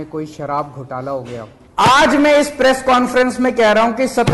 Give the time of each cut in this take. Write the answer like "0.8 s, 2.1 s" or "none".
1.6 s